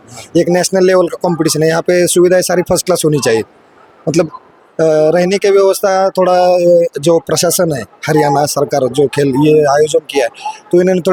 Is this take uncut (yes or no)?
yes